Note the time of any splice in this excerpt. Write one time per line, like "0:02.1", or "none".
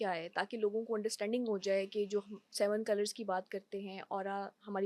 none